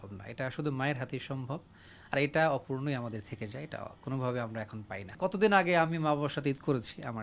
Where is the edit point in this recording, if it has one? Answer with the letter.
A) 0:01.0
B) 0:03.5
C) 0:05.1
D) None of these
C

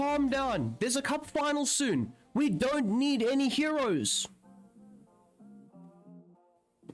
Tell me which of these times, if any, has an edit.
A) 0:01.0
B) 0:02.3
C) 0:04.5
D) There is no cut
D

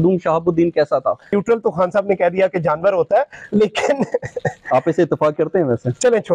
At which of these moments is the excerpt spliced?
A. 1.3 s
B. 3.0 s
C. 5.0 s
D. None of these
A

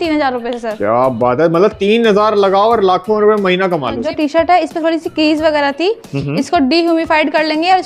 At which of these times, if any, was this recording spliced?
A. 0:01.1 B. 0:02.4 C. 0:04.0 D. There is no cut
C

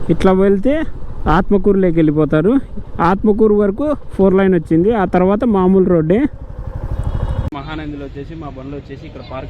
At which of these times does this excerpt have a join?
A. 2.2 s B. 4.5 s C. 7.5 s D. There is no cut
C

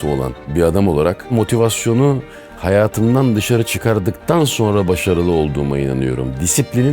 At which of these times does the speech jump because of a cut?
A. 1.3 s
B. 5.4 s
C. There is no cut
A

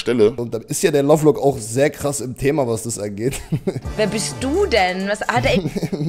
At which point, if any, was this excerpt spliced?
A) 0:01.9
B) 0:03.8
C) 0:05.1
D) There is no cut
B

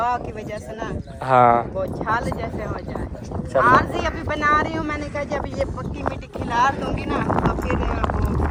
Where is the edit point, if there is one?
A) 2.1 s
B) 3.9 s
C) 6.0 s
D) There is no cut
D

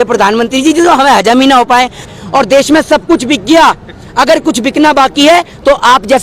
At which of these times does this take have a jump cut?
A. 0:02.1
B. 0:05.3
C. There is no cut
A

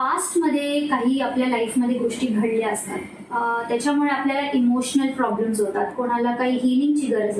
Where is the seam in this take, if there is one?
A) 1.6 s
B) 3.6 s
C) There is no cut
C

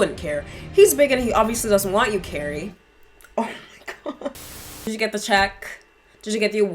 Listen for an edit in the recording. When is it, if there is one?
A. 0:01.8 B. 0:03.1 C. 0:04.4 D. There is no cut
C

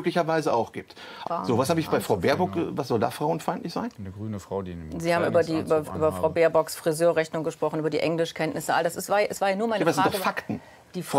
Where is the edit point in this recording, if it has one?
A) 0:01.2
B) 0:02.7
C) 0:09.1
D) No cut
A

